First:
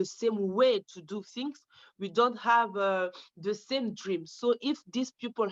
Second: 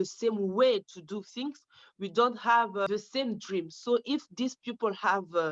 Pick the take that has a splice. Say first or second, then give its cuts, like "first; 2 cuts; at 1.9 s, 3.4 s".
second; 1 cut; at 2.9 s